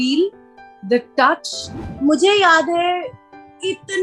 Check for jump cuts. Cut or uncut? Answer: cut